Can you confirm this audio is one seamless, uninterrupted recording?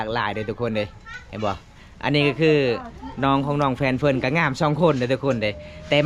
yes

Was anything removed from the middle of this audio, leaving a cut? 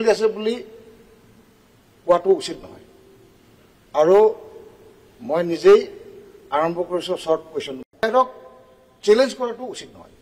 yes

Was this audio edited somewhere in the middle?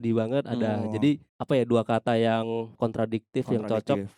yes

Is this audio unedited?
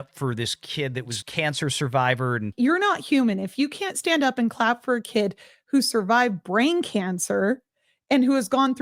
no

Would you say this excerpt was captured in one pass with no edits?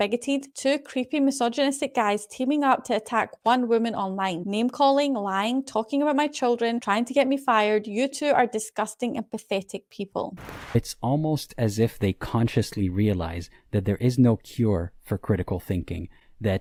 yes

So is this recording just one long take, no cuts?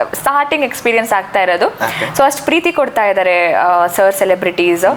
yes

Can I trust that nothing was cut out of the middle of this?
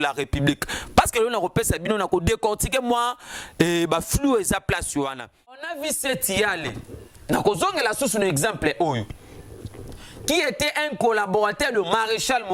no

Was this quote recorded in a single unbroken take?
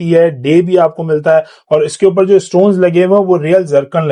yes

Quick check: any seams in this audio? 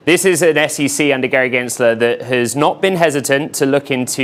no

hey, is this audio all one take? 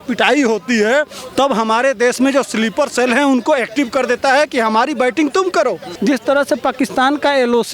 no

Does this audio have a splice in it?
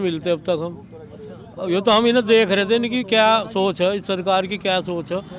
no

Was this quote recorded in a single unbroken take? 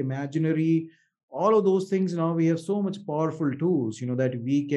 yes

